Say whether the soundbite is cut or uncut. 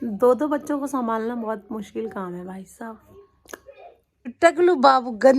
cut